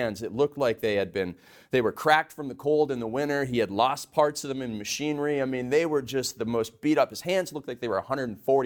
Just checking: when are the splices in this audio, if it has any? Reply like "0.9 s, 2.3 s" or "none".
none